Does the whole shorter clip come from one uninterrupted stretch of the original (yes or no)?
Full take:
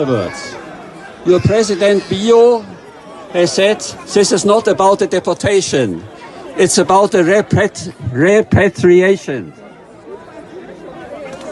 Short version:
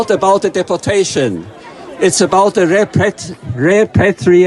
yes